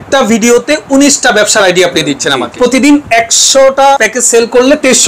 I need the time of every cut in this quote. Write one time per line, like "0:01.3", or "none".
0:02.5
0:04.0